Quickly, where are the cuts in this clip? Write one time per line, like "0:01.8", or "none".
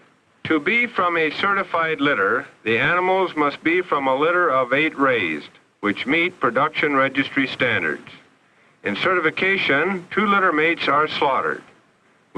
0:08.0